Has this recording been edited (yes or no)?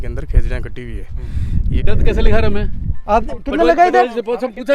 yes